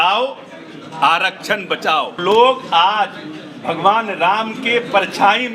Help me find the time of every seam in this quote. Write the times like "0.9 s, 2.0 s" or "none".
2.2 s